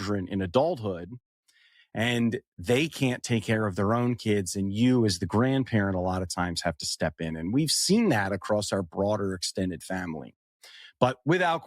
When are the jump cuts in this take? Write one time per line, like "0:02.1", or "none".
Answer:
none